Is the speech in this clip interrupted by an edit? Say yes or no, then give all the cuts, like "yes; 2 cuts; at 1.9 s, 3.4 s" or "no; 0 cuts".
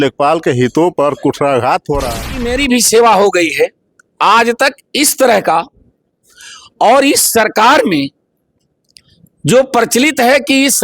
yes; 1 cut; at 2.4 s